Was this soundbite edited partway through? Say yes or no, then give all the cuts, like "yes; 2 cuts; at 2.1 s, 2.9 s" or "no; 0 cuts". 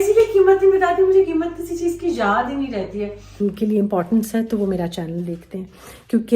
yes; 1 cut; at 3.4 s